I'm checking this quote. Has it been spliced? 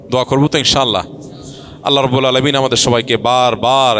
no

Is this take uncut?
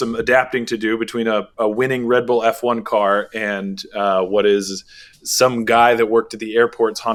yes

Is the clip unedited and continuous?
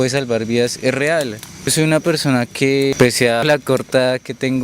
no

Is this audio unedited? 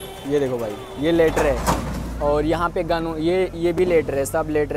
yes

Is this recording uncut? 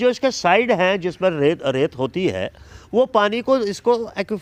yes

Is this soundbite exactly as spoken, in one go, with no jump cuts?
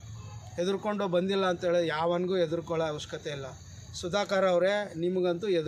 yes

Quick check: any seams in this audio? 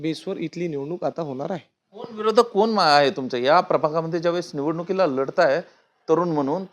no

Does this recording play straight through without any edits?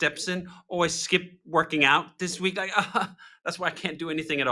yes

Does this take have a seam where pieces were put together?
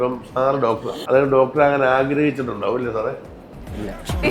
no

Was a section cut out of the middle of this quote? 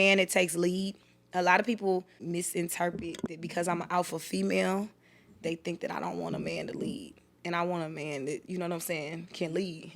yes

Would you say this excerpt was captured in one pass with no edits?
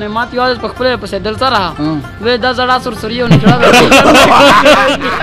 yes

